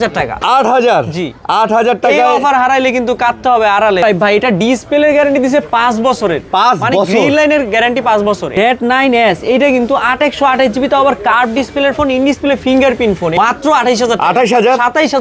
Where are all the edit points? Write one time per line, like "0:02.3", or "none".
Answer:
0:04.0
0:08.5
0:13.3

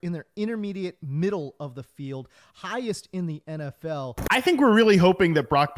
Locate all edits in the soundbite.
0:04.1

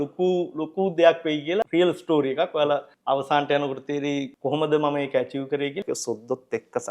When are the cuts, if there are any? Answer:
0:01.7
0:02.9
0:04.3
0:05.8

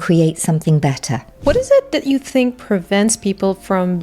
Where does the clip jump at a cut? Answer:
0:01.3

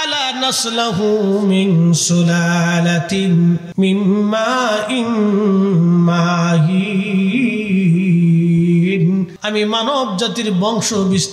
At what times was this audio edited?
0:03.7
0:09.4

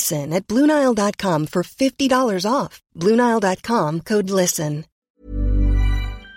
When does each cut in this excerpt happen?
0:05.1

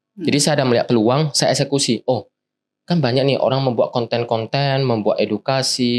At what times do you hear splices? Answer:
none

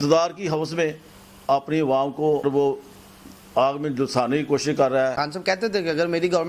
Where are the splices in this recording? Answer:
0:02.4
0:05.2

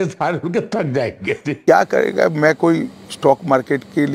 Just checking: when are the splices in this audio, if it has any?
0:01.5

